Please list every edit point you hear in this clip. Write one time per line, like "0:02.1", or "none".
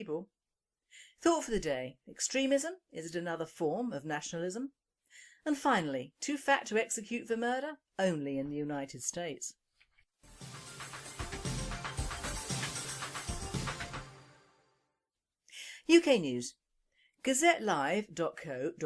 0:09.0